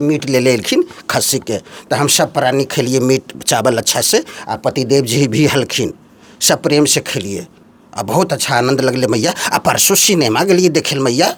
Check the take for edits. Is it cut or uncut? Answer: uncut